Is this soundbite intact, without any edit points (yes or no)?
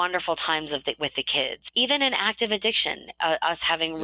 no